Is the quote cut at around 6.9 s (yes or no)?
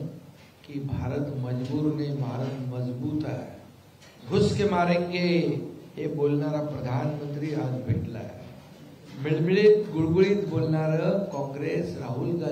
yes